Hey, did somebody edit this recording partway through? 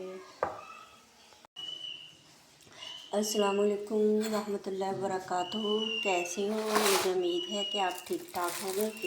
yes; 1 cut; at 1.5 s

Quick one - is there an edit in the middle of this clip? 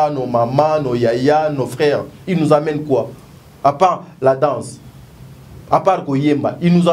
no; 0 cuts

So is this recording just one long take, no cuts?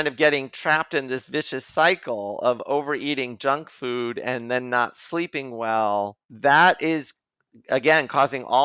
no; 1 cut; at 6.2 s

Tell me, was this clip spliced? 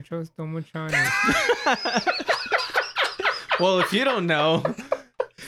no; 0 cuts

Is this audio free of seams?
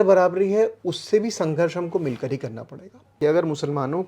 no; 1 cut; at 3.0 s

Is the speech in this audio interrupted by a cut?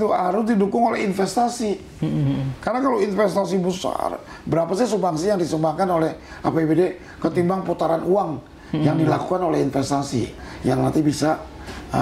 yes; 1 cut; at 10.5 s

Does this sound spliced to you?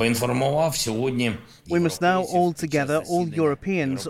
no; 0 cuts

